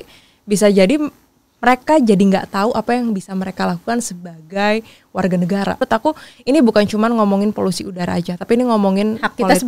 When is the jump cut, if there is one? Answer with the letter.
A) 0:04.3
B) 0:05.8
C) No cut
B